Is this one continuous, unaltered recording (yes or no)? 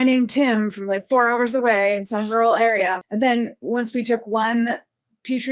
no